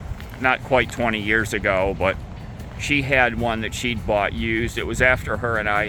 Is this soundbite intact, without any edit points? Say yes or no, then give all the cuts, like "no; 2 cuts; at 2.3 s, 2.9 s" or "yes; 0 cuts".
yes; 0 cuts